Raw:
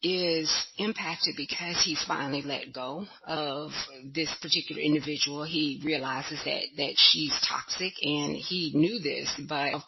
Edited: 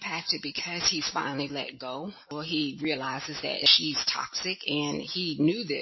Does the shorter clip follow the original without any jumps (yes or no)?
no